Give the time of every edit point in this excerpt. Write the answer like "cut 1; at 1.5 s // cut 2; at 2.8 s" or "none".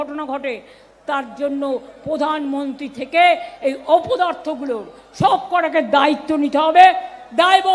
none